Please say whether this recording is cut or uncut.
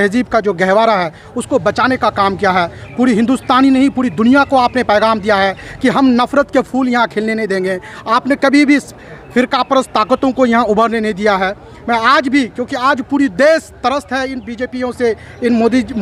uncut